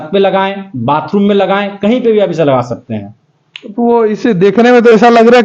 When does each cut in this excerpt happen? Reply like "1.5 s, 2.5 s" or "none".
none